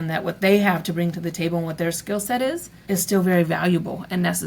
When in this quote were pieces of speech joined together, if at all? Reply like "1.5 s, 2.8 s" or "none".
2.8 s